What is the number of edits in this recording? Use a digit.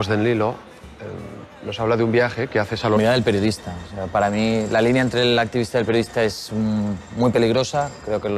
0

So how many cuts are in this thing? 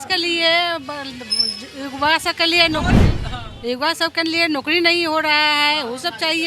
0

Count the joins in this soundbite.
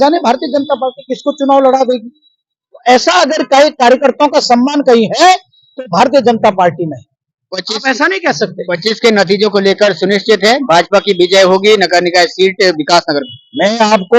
0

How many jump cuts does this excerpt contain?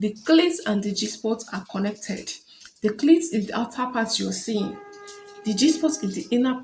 0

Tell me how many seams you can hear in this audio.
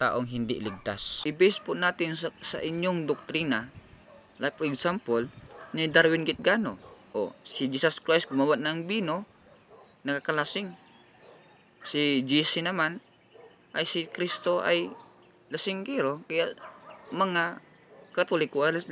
1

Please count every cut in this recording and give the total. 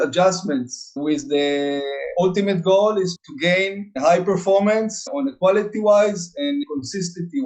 3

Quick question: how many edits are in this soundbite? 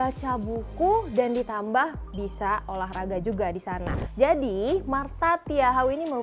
1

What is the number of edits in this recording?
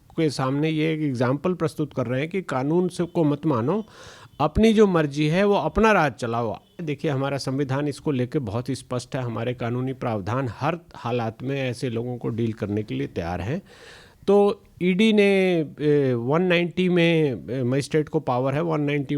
1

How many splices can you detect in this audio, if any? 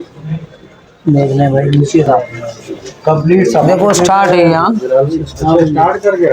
1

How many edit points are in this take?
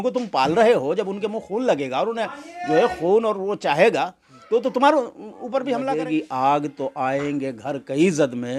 1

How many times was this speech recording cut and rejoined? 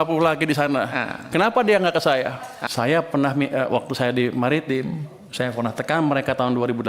1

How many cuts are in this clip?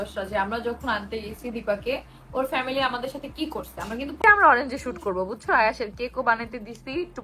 1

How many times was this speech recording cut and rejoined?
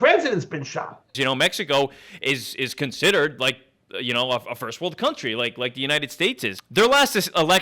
2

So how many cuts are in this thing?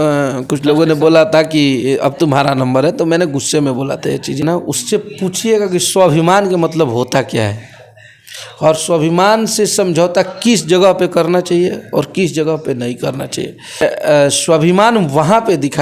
2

